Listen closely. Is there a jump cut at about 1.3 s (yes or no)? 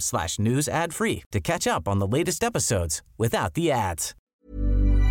no